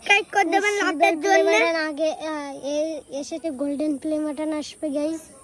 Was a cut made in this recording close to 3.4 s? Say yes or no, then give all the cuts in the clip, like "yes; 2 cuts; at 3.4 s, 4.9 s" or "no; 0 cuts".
yes; 1 cut; at 3.4 s